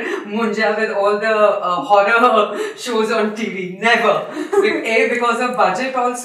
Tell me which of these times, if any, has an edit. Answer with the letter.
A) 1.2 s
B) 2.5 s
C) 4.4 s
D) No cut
D